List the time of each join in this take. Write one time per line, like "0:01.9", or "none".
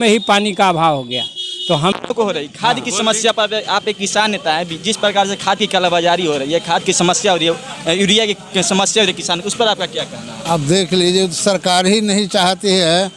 0:01.9

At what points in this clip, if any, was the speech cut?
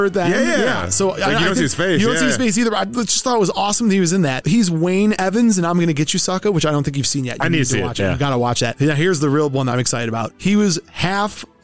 none

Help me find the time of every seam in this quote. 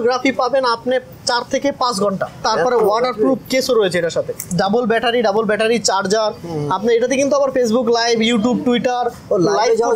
0:02.5
0:04.5

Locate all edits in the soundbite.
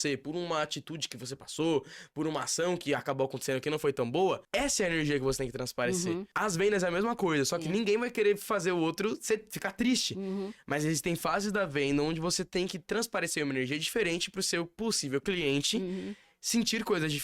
0:04.4
0:06.3

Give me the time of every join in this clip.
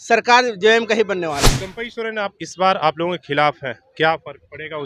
0:01.7

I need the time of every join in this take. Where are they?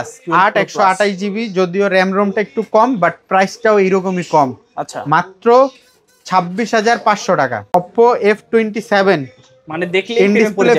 0:07.7

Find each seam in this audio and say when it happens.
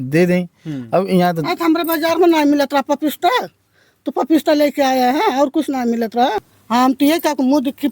0:06.5

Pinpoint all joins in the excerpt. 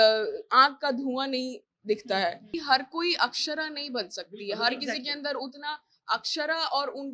0:02.5

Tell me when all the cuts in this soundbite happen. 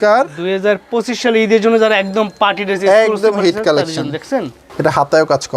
0:04.6

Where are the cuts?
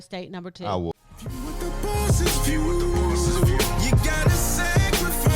0:01.0

